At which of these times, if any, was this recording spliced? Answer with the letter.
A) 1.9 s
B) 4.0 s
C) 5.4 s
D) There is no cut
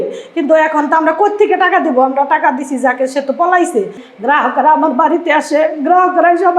B